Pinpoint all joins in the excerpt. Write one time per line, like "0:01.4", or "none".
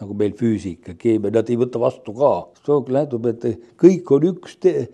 0:02.5